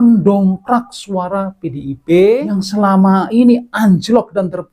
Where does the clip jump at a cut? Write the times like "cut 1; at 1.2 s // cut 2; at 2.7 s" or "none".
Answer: cut 1; at 2.5 s